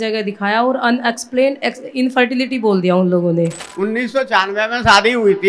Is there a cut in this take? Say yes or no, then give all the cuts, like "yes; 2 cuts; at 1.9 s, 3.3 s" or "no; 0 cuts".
yes; 1 cut; at 3.6 s